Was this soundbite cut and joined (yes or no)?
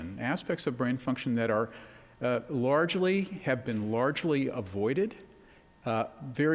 yes